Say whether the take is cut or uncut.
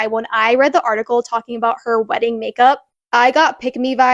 uncut